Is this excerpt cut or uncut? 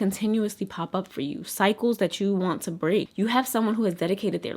cut